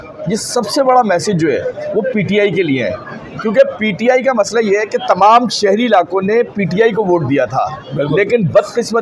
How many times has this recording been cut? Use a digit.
0